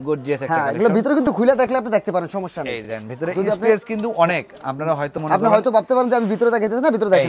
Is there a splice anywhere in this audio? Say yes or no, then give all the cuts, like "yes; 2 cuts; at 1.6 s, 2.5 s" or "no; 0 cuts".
no; 0 cuts